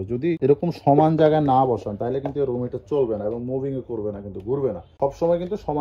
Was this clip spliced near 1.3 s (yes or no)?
no